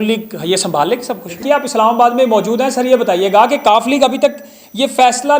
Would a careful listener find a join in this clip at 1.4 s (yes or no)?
yes